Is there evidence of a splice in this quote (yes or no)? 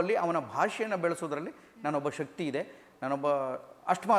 no